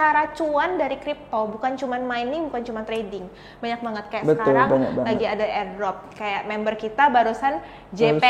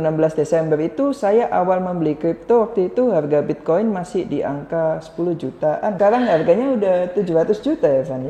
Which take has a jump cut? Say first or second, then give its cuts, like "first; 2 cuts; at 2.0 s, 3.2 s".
second; 1 cut; at 6.0 s